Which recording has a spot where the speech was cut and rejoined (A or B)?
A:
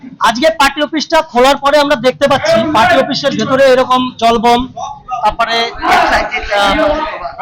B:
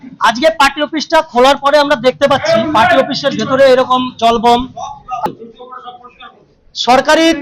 B